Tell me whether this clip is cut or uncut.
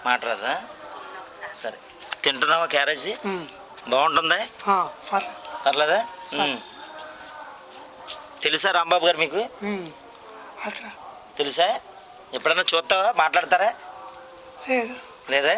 uncut